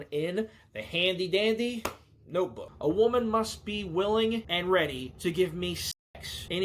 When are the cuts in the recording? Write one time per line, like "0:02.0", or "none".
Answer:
0:02.6
0:04.7
0:05.9